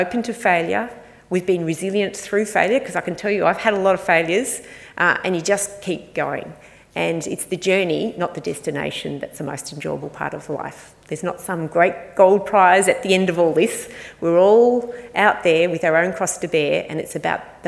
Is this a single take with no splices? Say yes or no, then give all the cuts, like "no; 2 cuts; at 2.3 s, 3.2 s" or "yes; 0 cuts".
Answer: yes; 0 cuts